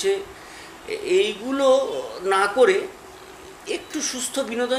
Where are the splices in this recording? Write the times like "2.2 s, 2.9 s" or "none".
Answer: none